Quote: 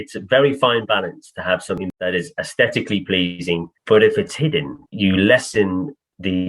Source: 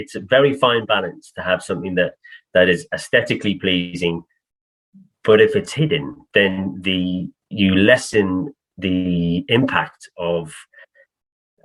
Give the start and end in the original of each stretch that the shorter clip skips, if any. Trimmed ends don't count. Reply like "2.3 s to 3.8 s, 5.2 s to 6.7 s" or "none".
1.8 s to 2.4 s, 4.3 s to 5.1 s, 6.2 s to 7.4 s